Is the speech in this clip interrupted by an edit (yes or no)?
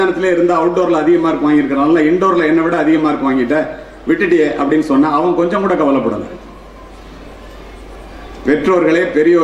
no